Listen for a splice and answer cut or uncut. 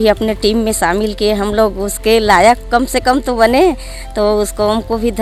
uncut